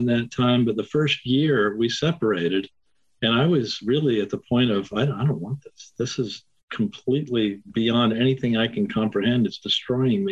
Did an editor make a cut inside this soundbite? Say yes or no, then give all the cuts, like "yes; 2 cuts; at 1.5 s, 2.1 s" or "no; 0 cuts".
no; 0 cuts